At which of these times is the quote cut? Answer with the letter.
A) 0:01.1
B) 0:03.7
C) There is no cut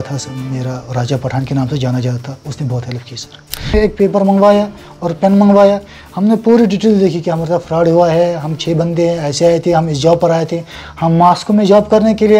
B